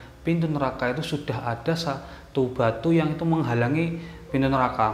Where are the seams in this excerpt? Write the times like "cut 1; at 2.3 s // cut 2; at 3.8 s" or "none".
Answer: none